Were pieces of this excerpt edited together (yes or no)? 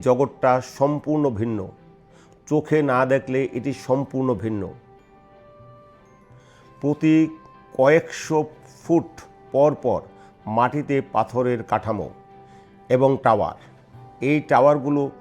yes